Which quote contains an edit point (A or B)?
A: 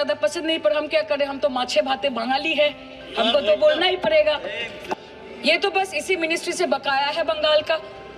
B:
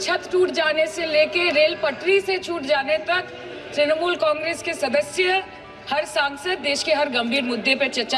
A